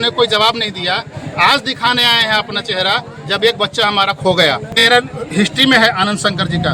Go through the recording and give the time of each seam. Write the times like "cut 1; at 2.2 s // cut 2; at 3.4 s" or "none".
cut 1; at 4.8 s